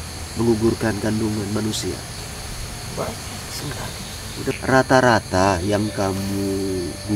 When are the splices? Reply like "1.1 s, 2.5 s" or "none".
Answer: 2.1 s, 4.5 s